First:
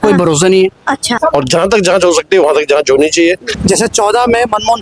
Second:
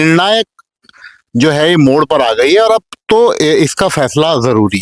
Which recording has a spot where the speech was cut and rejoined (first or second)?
first